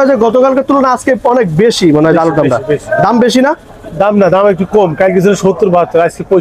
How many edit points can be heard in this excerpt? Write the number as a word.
zero